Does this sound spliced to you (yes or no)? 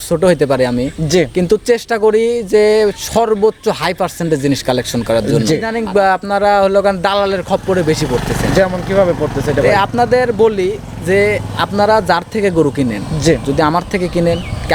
yes